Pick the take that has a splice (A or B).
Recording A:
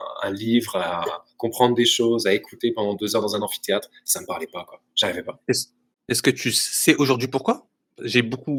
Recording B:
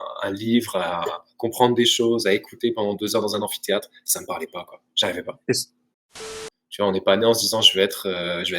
B